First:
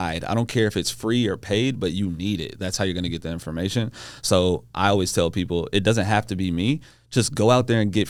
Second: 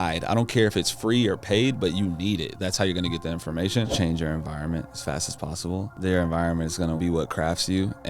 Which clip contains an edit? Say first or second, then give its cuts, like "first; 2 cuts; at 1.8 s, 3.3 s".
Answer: second; 3 cuts; at 3.9 s, 5.9 s, 7.0 s